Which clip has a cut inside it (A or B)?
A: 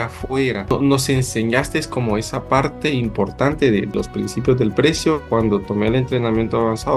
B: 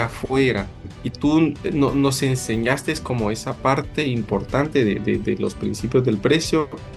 A